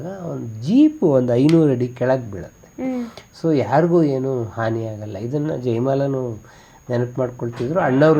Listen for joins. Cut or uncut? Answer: uncut